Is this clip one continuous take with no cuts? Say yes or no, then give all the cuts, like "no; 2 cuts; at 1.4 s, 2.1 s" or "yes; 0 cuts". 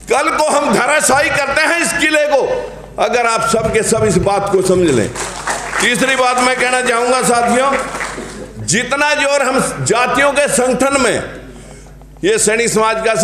yes; 0 cuts